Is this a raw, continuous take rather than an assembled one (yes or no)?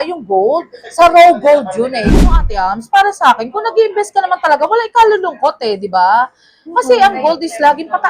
no